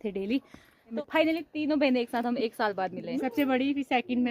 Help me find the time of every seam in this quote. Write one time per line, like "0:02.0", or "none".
0:01.0